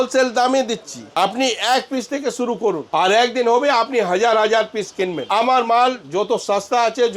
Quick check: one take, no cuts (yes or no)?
no